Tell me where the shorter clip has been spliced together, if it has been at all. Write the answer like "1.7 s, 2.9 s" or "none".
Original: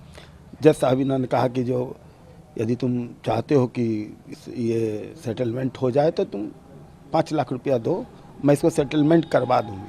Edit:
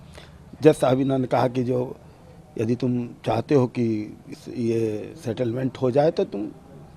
none

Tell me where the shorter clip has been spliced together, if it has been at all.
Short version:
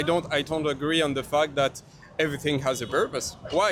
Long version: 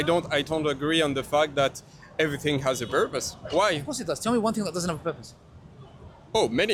none

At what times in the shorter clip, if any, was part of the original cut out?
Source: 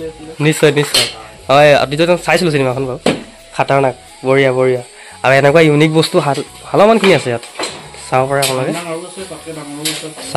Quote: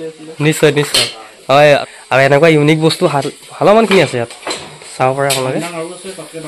1.9 s

